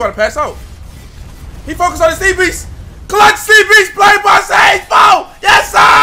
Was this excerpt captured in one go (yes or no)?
yes